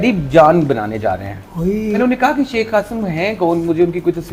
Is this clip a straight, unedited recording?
no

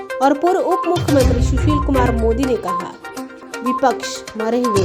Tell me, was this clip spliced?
no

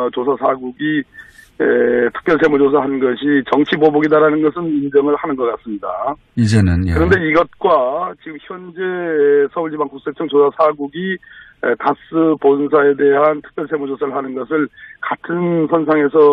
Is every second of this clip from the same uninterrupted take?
no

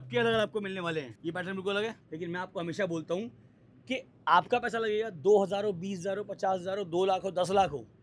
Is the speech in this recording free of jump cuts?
no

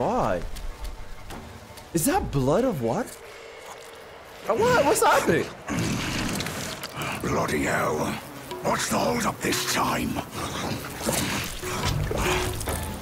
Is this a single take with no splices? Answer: no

